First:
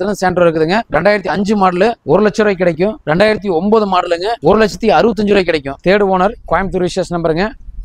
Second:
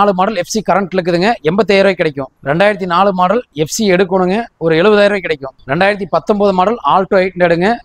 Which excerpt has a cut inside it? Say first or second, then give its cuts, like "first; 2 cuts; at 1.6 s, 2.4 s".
first; 5 cuts; at 0.8 s, 2.0 s, 3.0 s, 4.3 s, 5.7 s